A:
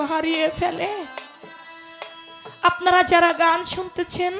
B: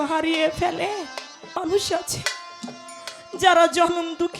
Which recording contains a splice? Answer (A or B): B